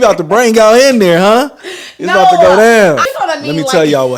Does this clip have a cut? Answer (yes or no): no